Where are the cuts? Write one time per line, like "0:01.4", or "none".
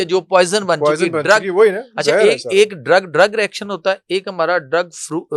none

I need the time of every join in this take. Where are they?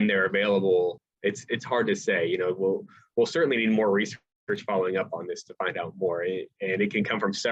0:01.1

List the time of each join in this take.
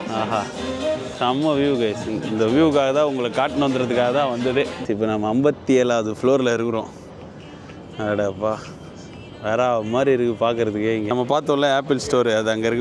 0:04.8
0:11.1

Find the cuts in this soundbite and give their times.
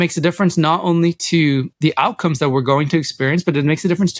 0:01.7

